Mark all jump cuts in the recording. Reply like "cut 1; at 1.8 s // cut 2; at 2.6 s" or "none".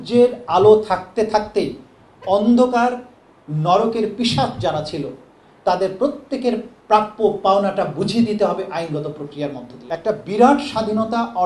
cut 1; at 9.7 s